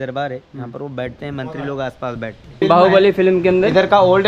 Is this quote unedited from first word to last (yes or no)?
no